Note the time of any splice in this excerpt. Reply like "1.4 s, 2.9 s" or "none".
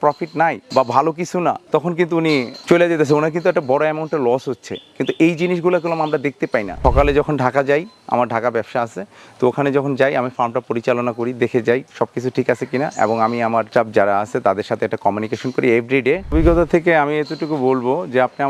6.7 s, 16.3 s